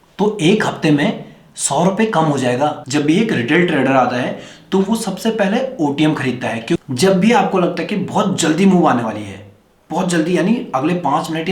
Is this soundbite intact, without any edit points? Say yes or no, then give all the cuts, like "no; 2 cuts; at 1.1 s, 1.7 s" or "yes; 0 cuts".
no; 2 cuts; at 2.8 s, 6.8 s